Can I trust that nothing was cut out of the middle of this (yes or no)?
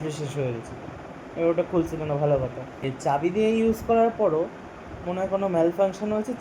no